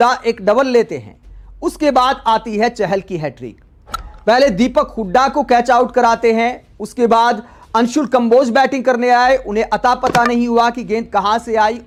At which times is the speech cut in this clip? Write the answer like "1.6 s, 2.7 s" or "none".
none